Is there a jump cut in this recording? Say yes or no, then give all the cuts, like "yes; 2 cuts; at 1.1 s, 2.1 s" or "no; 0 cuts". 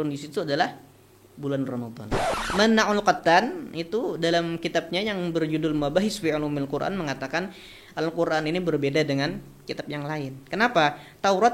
yes; 1 cut; at 2.4 s